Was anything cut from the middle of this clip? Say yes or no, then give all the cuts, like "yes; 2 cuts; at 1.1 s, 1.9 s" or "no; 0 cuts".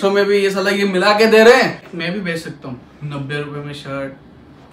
yes; 1 cut; at 1.8 s